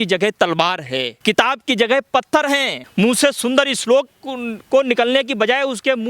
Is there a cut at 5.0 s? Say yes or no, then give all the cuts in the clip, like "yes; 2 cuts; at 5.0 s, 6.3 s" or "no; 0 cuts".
no; 2 cuts; at 1.1 s, 2.8 s